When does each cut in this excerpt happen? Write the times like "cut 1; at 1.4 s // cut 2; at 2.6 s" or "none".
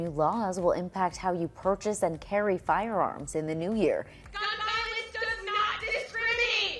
cut 1; at 4.2 s